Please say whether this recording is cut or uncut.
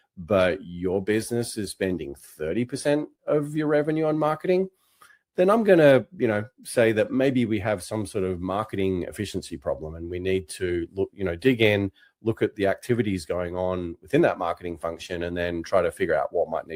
uncut